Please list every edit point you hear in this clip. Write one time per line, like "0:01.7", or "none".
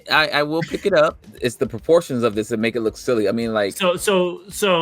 0:01.2